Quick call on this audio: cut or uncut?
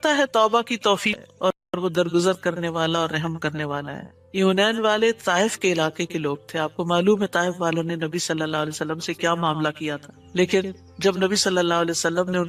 cut